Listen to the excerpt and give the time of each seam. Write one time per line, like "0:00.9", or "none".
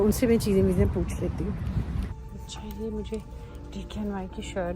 0:02.1

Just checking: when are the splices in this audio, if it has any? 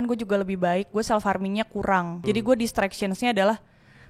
0:02.1

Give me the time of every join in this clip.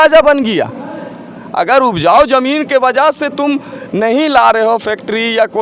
none

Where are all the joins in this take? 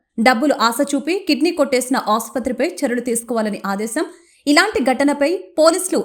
none

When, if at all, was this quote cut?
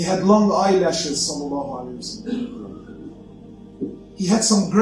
0:03.2

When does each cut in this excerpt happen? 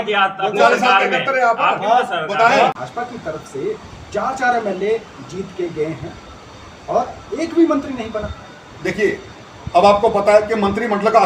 0:02.9

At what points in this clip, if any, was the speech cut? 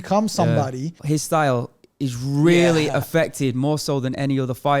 0:01.0

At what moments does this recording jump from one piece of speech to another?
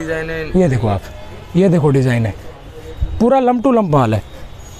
none

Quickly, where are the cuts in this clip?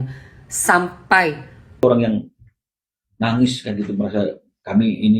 0:01.8

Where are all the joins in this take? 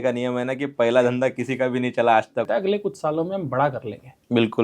0:02.5

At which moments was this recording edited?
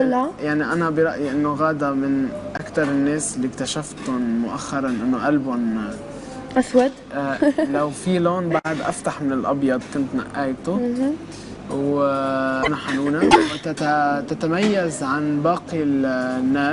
0:01.5

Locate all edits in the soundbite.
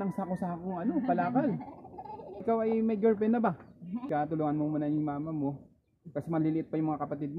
0:02.4
0:04.1

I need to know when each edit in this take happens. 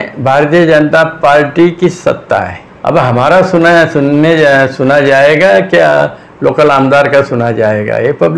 0:02.6

